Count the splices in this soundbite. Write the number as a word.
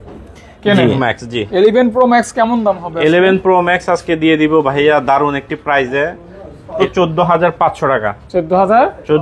two